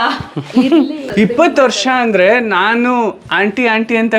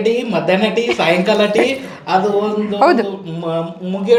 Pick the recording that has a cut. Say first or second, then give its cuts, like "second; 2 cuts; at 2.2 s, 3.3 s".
first; 1 cut; at 1.1 s